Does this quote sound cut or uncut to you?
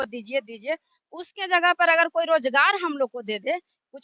uncut